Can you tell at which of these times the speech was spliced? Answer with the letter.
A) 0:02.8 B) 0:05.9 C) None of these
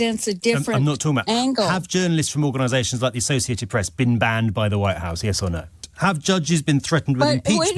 B